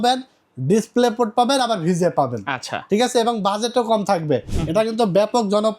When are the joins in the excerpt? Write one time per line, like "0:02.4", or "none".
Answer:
0:04.6